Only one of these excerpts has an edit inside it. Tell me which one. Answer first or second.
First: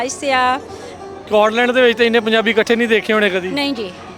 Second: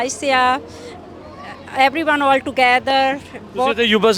first